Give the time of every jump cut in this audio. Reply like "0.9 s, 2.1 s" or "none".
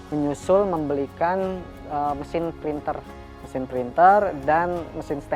none